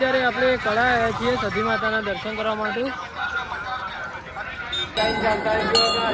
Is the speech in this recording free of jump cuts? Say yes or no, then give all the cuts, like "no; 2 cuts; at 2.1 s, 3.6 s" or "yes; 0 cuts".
no; 1 cut; at 5.0 s